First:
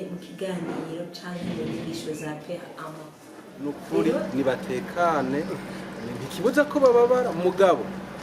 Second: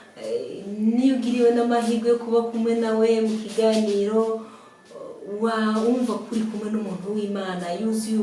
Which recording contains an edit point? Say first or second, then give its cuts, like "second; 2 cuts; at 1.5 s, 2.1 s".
first; 1 cut; at 3.9 s